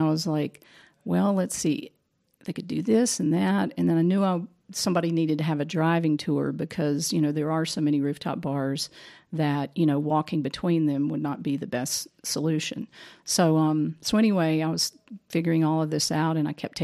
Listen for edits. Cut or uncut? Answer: uncut